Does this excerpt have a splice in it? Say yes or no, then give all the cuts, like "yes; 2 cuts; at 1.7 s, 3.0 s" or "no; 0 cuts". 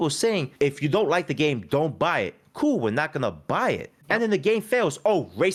no; 0 cuts